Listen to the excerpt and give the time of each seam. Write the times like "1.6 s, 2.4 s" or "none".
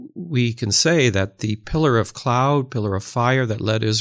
none